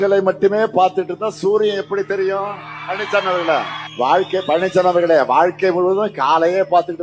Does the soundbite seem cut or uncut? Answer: cut